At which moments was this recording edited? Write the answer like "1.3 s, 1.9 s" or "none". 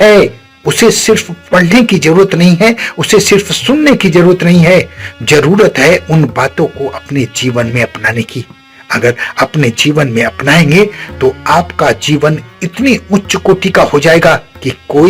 none

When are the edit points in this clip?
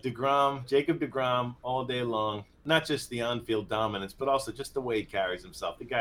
2.6 s

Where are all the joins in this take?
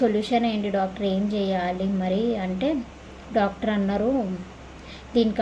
none

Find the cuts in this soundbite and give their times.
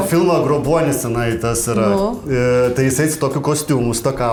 none

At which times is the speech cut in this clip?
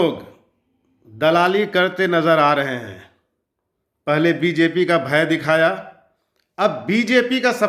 none

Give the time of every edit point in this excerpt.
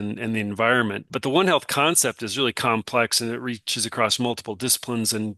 1.1 s

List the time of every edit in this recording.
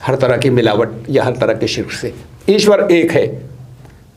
none

